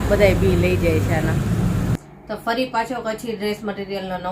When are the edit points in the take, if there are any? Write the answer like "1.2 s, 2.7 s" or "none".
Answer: 1.9 s